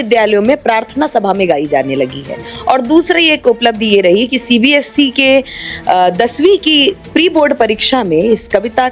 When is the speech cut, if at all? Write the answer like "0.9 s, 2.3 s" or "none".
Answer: 2.5 s